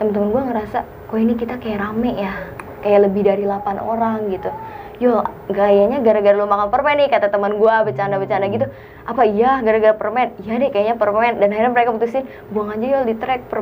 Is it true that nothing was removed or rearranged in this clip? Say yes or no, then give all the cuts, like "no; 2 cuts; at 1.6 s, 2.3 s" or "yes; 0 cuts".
yes; 0 cuts